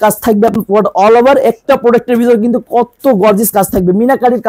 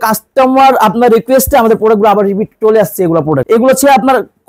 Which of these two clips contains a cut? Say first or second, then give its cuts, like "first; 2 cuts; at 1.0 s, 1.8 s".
second; 1 cut; at 3.4 s